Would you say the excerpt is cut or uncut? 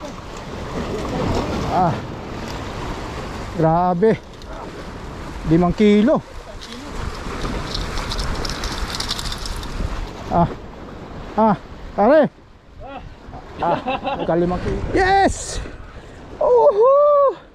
cut